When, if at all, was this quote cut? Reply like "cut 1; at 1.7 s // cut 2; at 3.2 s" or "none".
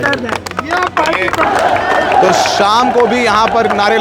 cut 1; at 1.4 s